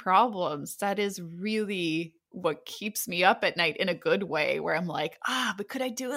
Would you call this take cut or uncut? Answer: uncut